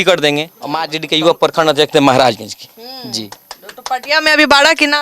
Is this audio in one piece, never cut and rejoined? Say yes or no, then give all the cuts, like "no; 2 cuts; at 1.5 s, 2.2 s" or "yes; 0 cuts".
no; 1 cut; at 1.0 s